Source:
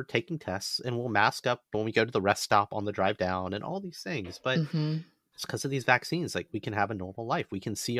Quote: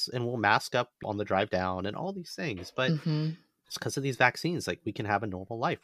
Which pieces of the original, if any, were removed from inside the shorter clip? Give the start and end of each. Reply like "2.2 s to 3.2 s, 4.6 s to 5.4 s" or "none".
1.7 s to 2.7 s